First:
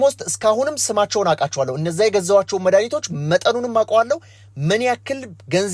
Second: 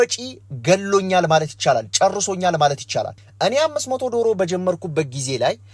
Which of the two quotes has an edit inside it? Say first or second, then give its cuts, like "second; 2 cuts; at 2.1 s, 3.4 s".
second; 1 cut; at 3.2 s